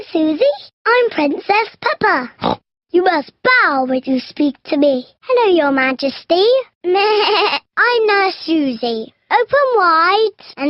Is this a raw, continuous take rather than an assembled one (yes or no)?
no